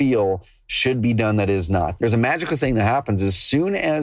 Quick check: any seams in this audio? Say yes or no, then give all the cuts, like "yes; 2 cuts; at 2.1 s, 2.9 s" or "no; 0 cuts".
yes; 1 cut; at 1.9 s